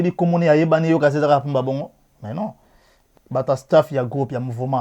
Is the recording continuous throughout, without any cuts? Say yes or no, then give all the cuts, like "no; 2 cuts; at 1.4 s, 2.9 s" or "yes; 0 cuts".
no; 1 cut; at 3.0 s